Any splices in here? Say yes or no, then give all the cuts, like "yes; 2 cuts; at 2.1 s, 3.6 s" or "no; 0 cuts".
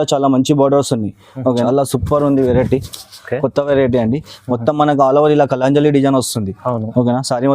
yes; 1 cut; at 1.5 s